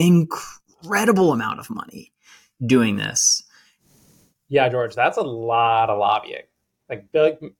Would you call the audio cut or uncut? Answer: cut